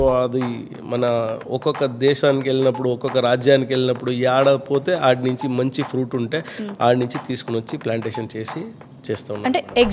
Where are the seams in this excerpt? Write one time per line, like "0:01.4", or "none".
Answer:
none